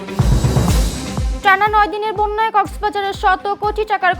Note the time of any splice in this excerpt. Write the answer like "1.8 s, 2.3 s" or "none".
1.3 s